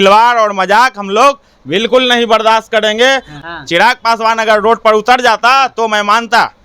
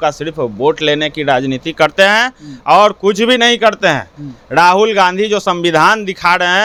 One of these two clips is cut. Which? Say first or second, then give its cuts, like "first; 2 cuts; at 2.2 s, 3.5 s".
first; 1 cut; at 3.3 s